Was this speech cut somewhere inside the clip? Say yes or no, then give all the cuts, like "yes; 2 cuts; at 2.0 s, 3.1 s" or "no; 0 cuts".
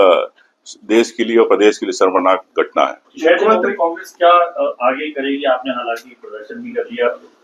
no; 0 cuts